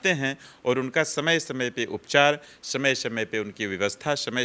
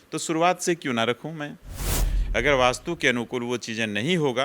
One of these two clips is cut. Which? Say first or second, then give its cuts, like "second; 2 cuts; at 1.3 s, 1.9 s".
second; 1 cut; at 2.1 s